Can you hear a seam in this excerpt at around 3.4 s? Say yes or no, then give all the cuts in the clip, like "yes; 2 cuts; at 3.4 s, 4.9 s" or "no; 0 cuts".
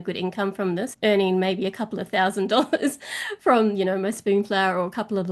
no; 1 cut; at 0.9 s